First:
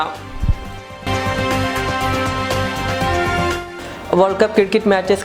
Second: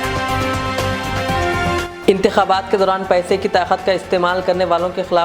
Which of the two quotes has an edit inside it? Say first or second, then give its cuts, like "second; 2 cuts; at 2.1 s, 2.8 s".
second; 1 cut; at 1.8 s